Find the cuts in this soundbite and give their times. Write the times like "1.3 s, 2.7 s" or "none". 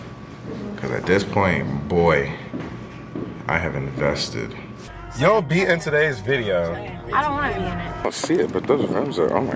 4.7 s, 8.0 s